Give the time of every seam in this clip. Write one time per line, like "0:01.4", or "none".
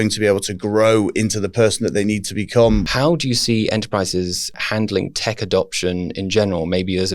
0:02.8
0:04.6